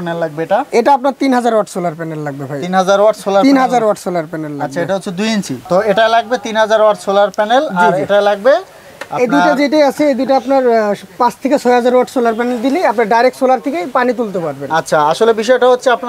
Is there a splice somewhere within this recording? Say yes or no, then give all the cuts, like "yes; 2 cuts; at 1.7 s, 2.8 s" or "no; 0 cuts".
no; 0 cuts